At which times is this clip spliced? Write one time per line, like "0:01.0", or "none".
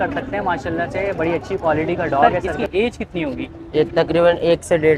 0:02.2